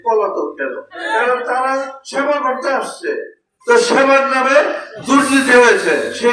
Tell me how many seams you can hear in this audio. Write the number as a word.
two